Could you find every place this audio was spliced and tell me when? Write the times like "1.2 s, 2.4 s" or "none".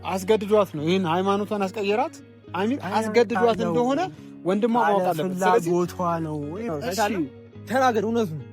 6.7 s